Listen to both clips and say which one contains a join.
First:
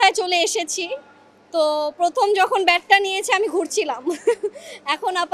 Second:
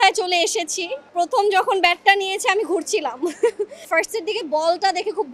second; 2 cuts; at 1.1 s, 3.9 s

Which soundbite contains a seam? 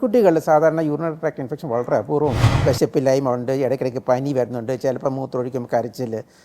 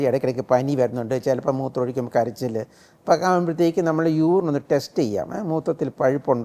first; 1 cut; at 2.5 s

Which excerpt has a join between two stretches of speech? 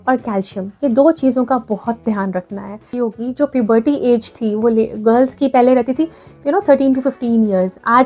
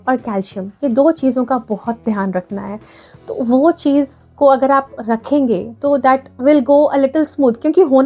first; 1 cut; at 2.9 s

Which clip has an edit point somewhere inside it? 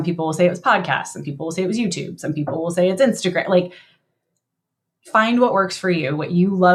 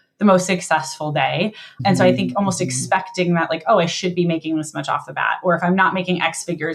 second; 1 cut; at 1.8 s

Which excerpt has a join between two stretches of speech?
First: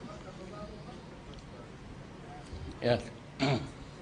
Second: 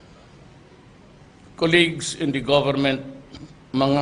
first; 1 cut; at 1.0 s

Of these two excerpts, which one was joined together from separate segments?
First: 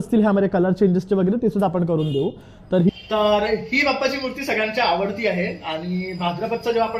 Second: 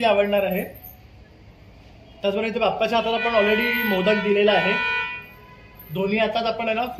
first; 1 cut; at 2.9 s

